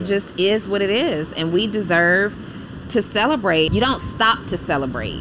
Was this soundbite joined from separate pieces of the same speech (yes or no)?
yes